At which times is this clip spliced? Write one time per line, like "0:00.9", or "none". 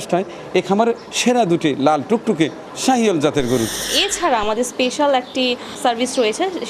0:03.9
0:05.8

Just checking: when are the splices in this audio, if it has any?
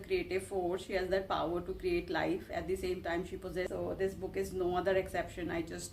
0:03.7

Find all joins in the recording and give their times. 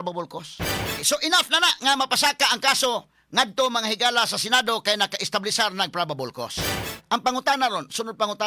0:01.0
0:06.9

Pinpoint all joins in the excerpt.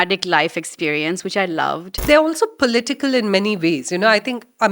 0:01.9

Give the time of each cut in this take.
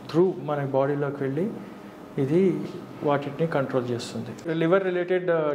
0:04.4

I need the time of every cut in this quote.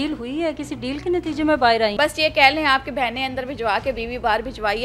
0:01.9

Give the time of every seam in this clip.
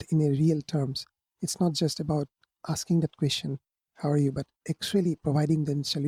none

